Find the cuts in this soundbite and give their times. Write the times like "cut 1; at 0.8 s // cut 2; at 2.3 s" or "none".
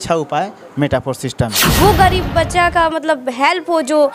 cut 1; at 1.6 s